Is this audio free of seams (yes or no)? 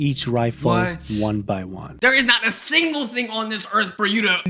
no